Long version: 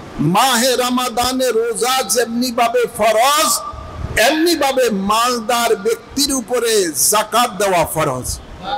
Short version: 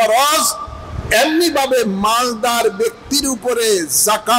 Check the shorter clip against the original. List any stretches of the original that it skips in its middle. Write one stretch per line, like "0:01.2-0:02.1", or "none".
none